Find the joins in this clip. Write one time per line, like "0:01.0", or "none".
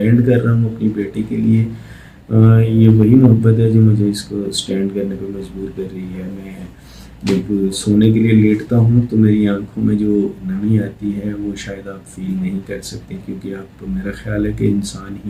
none